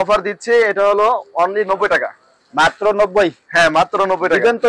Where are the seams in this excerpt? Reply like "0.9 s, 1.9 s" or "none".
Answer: none